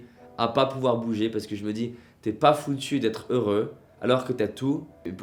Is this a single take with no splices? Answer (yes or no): yes